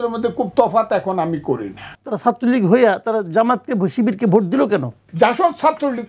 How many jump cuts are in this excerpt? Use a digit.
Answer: 2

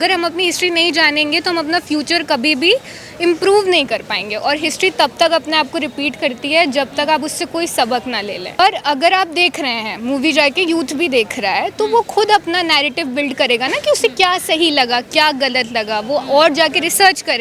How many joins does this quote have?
1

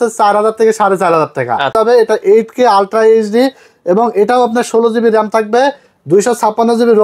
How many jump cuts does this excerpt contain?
1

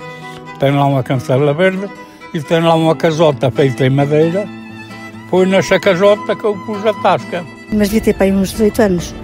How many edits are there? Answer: 0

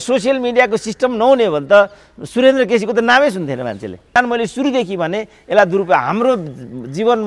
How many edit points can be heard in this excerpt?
1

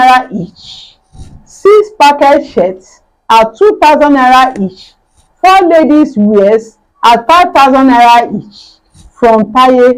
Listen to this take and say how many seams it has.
0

